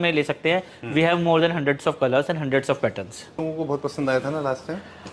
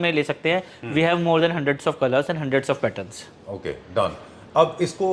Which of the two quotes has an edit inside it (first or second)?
first